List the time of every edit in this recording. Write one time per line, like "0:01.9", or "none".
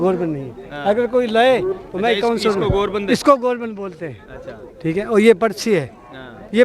none